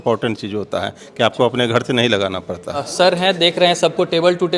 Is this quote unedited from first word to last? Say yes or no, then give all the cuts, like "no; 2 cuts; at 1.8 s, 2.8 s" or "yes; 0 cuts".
no; 1 cut; at 2.9 s